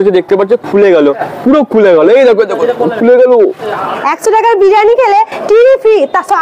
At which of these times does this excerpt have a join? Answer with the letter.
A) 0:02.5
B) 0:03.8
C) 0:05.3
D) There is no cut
B